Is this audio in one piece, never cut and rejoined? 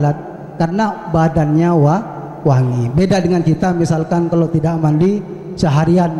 yes; 0 cuts

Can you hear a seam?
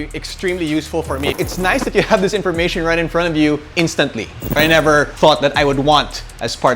yes; 2 cuts; at 1.3 s, 4.5 s

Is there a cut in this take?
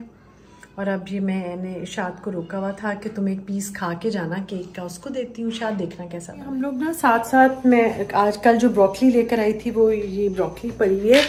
no; 0 cuts

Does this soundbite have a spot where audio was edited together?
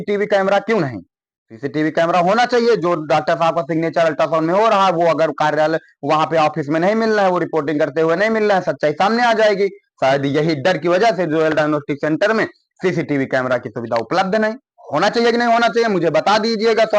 no; 0 cuts

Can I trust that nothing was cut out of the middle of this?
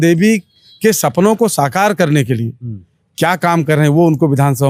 yes; 0 cuts

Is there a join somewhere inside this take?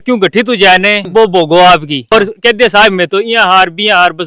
yes; 2 cuts; at 1.0 s, 2.1 s

